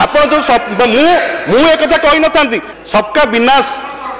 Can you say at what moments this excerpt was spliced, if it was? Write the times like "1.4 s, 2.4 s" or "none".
2.7 s